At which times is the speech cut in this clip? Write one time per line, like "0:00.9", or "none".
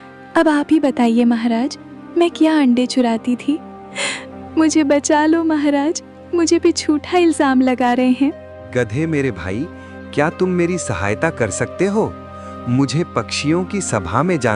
0:08.5